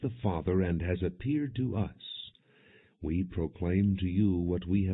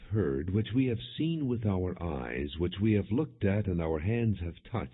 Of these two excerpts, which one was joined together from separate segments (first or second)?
first